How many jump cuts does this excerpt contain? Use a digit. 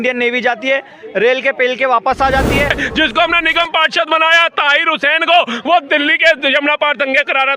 1